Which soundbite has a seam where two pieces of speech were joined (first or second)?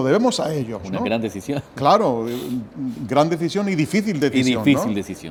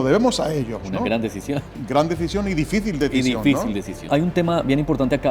second